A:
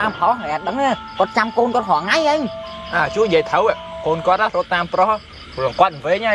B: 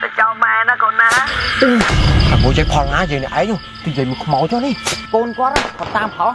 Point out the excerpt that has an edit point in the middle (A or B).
B